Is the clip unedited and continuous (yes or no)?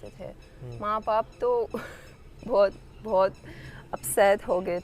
yes